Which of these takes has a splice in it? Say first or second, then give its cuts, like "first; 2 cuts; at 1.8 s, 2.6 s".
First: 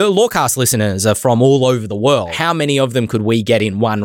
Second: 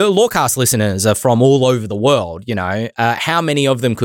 first; 1 cut; at 2.4 s